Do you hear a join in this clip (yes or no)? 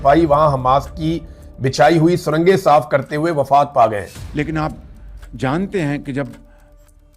yes